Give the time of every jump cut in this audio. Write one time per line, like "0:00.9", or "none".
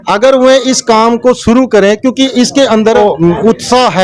0:03.0